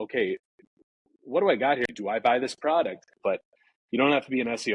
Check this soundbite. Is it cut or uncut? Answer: cut